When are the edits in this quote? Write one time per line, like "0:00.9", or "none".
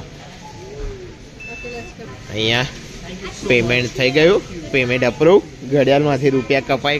none